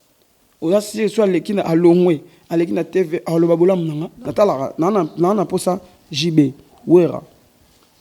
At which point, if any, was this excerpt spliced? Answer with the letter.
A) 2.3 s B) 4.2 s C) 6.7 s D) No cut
B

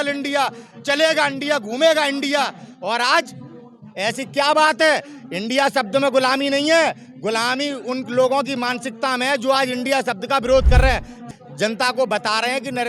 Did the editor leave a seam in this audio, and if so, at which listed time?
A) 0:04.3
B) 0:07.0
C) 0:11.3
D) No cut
C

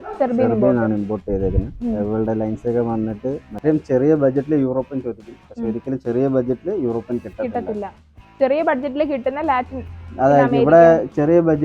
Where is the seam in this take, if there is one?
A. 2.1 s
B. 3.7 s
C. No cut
B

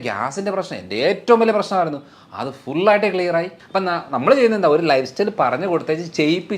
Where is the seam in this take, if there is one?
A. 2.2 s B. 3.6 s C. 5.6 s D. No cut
B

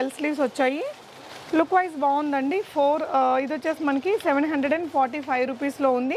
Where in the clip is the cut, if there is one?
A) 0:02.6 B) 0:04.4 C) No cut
C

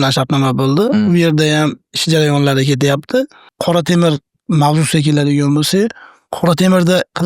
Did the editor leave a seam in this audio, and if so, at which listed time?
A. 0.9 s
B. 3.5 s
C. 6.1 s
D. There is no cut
B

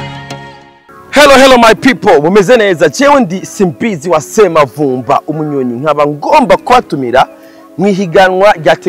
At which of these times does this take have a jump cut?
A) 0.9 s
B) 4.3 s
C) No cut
A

